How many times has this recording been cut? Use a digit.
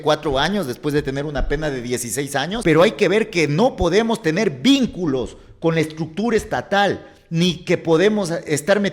1